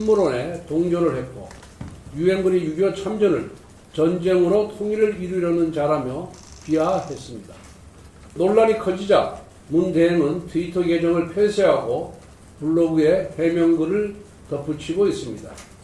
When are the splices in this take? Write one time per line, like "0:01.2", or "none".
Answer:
0:08.3